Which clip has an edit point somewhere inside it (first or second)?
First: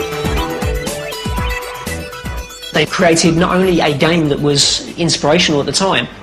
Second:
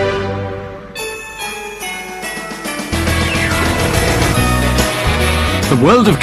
first